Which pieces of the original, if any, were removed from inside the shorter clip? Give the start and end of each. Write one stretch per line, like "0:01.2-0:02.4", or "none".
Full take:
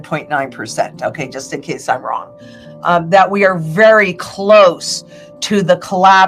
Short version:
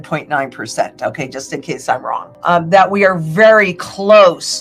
0:02.3-0:02.7